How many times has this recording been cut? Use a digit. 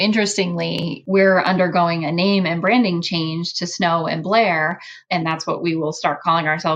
2